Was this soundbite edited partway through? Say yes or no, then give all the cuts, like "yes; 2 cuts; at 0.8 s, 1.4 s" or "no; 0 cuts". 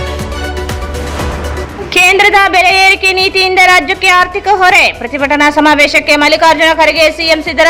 yes; 1 cut; at 1.7 s